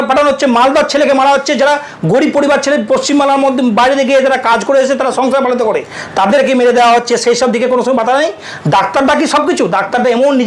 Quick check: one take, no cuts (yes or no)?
yes